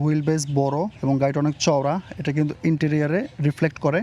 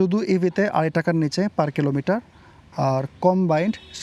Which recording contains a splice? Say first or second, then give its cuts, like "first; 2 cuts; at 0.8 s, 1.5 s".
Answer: first; 1 cut; at 0.9 s